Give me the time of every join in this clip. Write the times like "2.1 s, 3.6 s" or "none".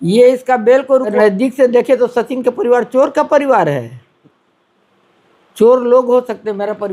1.1 s